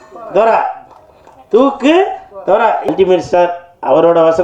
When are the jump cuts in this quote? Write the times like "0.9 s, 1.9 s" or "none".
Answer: 2.9 s